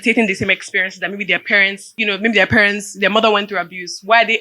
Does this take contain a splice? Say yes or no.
yes